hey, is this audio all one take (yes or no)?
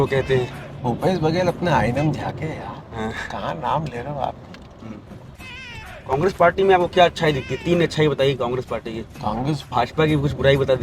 no